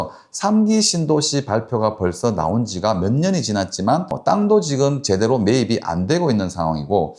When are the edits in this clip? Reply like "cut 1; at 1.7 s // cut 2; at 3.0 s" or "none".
none

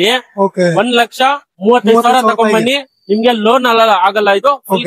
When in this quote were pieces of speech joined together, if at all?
none

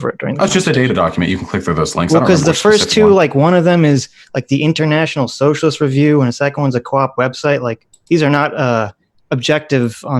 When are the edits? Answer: none

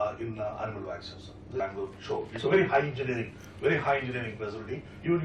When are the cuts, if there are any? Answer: cut 1; at 1.6 s

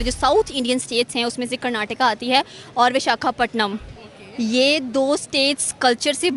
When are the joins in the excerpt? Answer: none

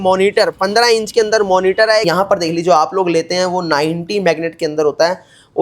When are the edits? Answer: cut 1; at 2.1 s

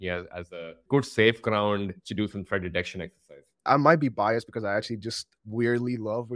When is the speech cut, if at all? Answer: cut 1; at 3.7 s // cut 2; at 5.3 s

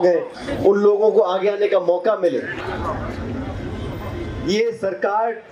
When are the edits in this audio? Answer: none

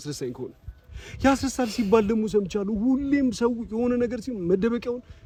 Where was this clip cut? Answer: none

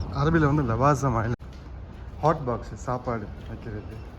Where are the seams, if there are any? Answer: cut 1; at 1.4 s

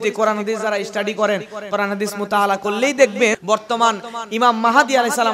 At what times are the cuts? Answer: none

